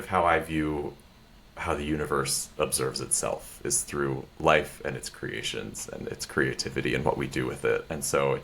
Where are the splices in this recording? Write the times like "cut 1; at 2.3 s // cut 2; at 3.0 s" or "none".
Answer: none